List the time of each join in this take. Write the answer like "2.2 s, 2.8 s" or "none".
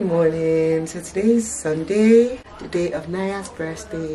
2.5 s